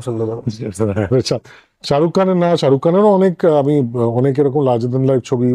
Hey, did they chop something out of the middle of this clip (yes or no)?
no